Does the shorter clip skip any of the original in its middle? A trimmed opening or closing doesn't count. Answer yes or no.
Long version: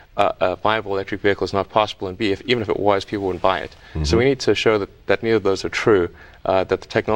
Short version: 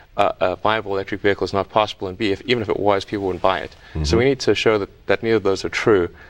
no